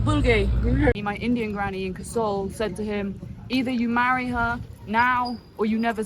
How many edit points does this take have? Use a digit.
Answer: 1